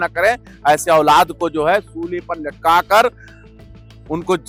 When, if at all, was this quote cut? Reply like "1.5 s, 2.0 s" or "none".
none

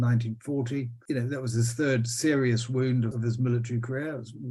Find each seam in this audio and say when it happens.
3.1 s

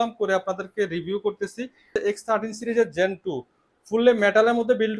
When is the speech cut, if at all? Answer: 1.9 s

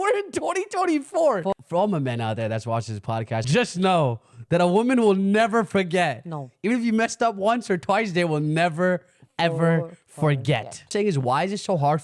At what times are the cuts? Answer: 1.5 s, 3.4 s, 10.9 s

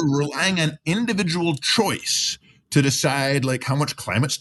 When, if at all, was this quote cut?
none

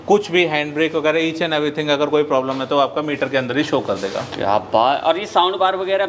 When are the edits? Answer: none

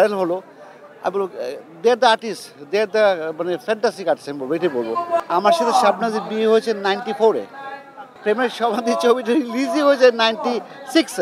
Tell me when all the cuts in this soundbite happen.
5.2 s, 8.2 s

